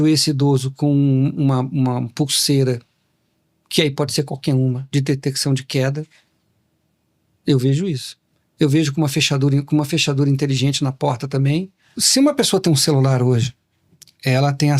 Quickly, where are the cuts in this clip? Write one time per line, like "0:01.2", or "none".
0:11.9